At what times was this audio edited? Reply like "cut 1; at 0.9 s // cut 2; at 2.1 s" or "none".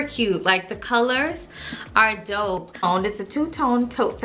cut 1; at 2.8 s